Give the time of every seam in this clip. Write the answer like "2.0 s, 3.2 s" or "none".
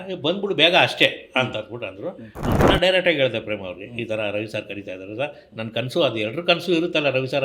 2.3 s